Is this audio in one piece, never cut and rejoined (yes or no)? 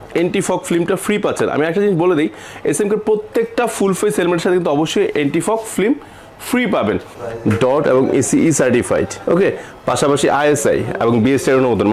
no